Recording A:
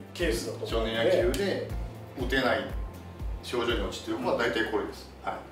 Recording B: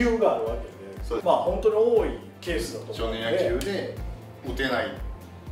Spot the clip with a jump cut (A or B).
B